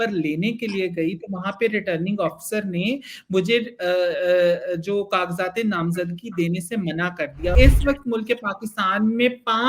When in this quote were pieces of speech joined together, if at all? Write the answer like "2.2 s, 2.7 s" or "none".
7.5 s